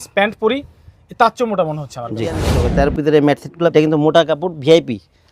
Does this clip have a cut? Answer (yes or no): yes